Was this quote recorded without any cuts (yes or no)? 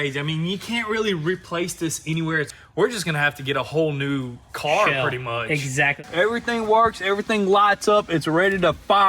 no